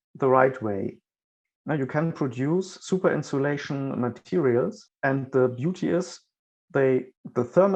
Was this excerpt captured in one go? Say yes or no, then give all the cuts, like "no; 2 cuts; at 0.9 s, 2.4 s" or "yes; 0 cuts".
yes; 0 cuts